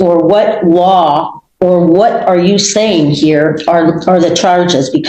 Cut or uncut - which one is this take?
uncut